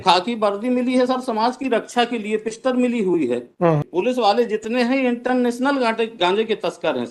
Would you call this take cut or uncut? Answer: cut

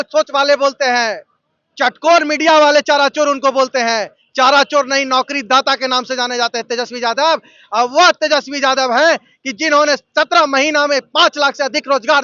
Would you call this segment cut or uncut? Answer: uncut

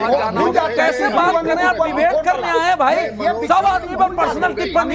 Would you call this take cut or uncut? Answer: uncut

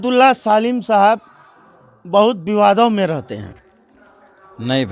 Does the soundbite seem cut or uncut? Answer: uncut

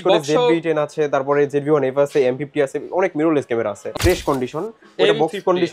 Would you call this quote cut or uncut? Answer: cut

